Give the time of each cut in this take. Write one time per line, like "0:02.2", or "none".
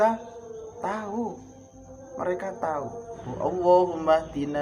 0:03.2

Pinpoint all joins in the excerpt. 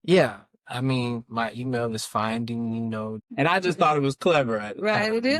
0:03.2

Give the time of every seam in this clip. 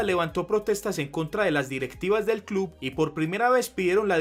none

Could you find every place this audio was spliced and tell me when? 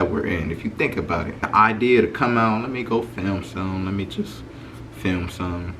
0:01.4

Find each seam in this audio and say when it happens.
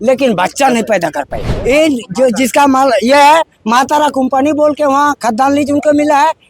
0:01.4

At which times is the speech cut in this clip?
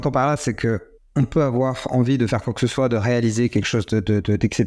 0:01.0

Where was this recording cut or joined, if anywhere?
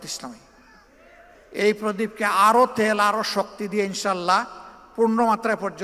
0:01.4

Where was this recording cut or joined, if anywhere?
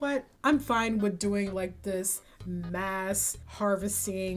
none

